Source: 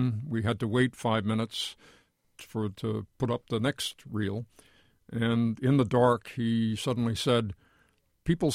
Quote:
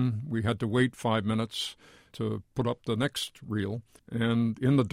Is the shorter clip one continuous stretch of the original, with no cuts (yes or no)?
no